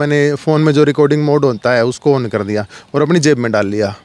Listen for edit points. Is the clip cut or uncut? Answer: uncut